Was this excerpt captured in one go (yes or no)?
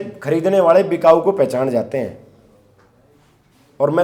yes